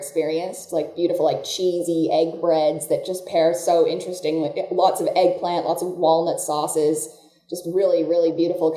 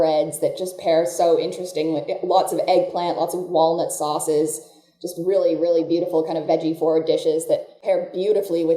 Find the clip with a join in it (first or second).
second